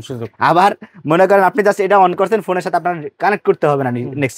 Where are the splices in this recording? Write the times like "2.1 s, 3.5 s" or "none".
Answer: none

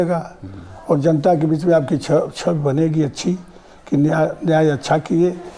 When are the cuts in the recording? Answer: none

